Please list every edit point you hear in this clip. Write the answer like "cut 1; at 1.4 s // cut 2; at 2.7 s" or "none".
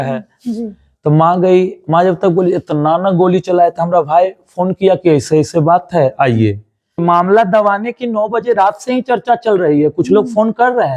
cut 1; at 7.0 s